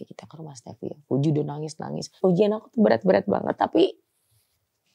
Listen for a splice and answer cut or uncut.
cut